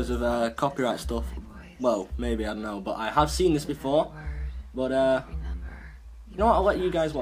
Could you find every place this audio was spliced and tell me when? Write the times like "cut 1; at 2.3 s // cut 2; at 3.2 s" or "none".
cut 1; at 3.4 s